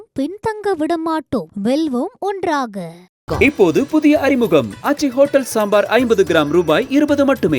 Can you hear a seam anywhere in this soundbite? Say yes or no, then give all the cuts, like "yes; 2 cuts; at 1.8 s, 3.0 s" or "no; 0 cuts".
no; 0 cuts